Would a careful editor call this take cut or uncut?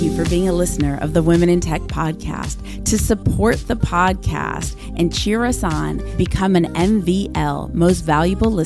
uncut